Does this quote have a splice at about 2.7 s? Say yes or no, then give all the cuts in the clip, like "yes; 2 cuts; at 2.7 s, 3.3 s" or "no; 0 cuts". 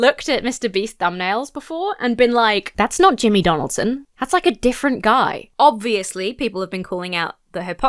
yes; 2 cuts; at 2.7 s, 5.4 s